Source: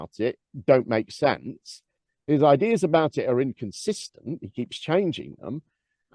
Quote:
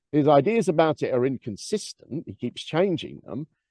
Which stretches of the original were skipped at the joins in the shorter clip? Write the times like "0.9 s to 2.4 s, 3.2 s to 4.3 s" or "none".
none